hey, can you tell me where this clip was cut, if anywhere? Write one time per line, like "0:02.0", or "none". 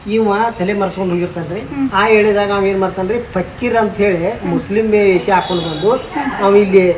0:01.9

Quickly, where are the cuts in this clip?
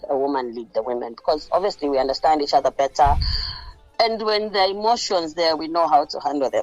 none

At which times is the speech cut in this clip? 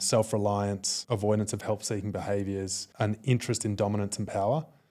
0:00.9
0:02.8

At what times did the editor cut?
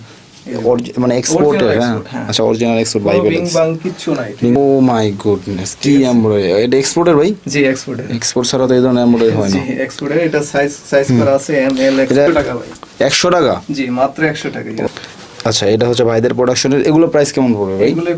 0:04.6
0:12.3
0:14.9

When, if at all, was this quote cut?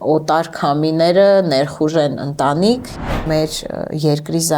0:03.0

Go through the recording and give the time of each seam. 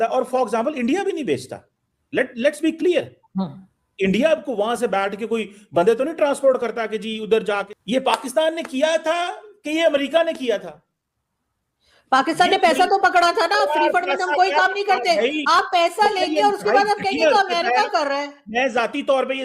0:07.7

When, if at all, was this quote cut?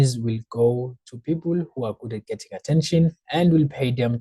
none

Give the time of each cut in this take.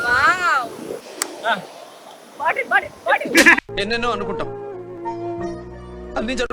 0:01.1

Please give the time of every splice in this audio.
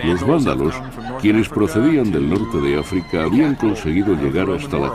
0:02.1

